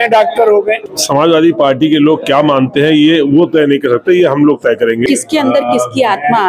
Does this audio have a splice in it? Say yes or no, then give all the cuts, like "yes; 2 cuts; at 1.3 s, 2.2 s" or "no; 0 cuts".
yes; 2 cuts; at 0.8 s, 5.0 s